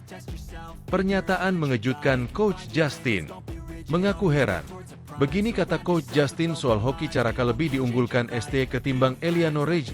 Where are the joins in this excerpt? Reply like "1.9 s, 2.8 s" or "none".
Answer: 0.9 s

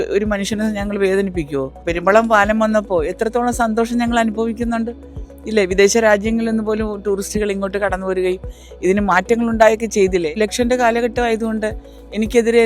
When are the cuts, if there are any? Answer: 1.8 s, 10.3 s

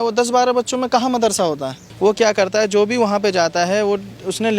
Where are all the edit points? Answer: 1.8 s

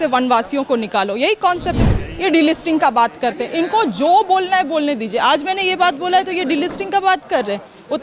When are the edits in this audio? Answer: 1.9 s

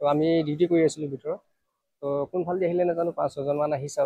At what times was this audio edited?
3.1 s

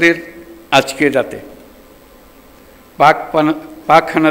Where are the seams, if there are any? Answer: none

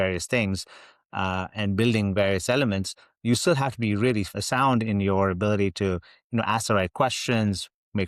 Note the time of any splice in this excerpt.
4.4 s

